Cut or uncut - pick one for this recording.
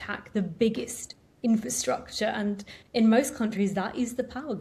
uncut